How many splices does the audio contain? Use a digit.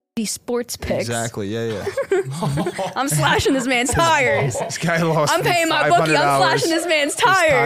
0